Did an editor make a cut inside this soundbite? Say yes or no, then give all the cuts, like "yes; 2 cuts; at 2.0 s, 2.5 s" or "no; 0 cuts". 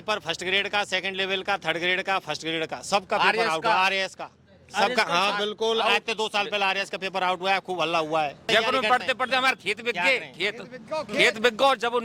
yes; 1 cut; at 8.4 s